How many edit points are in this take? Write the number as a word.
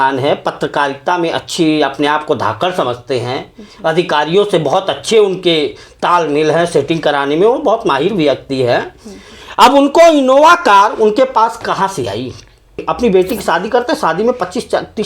one